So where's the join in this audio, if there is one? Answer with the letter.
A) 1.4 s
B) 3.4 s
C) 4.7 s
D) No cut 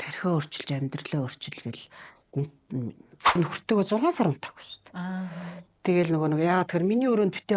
B